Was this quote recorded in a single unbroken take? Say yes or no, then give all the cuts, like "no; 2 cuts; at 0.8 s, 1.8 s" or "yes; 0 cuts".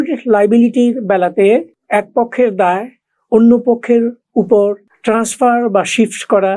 yes; 0 cuts